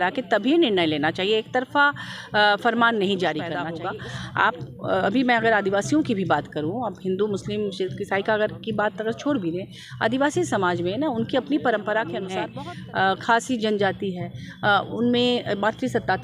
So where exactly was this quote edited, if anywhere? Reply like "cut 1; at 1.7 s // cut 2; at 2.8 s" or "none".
cut 1; at 3.7 s // cut 2; at 12.4 s